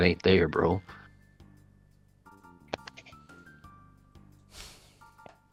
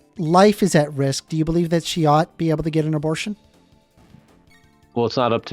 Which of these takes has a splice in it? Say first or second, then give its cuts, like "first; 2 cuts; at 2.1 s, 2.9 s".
second; 1 cut; at 4.5 s